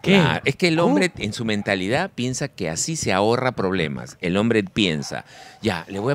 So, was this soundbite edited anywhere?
no; 0 cuts

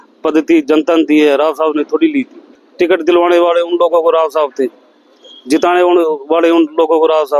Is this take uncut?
no; 1 cut; at 2.5 s

